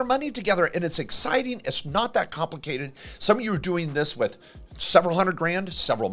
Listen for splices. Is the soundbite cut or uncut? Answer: uncut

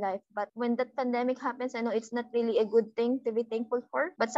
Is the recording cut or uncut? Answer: uncut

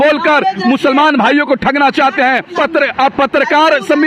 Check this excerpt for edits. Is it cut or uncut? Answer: cut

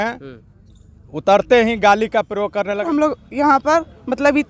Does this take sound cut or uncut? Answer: cut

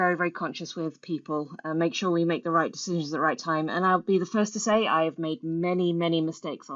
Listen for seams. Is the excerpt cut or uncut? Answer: uncut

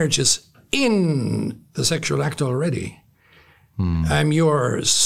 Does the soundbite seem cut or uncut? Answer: uncut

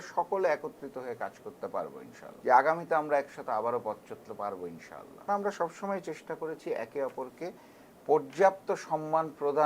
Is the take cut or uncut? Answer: cut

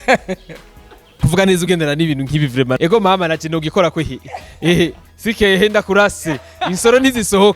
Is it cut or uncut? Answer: cut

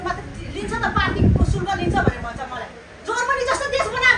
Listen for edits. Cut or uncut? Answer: uncut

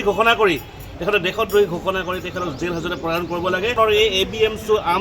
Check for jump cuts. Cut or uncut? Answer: cut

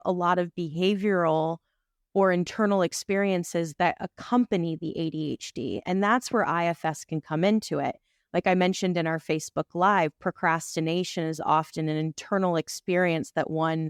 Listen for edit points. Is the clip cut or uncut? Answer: uncut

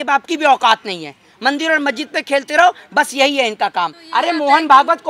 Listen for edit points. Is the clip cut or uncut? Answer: cut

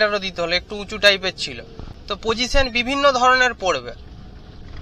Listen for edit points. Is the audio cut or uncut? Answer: uncut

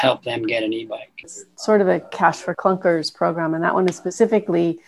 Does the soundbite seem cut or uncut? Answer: cut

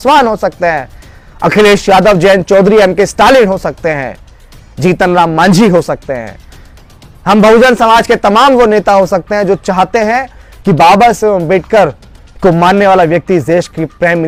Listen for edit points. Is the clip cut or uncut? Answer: uncut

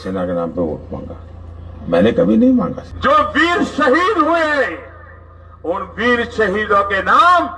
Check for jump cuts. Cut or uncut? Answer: cut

